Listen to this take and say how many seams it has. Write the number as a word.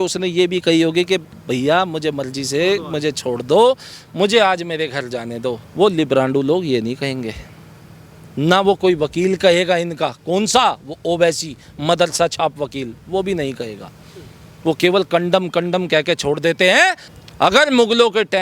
zero